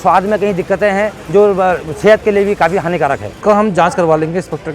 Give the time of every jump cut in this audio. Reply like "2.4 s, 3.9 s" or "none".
1.2 s, 3.3 s